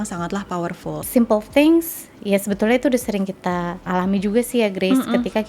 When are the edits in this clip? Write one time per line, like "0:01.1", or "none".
0:01.0
0:03.8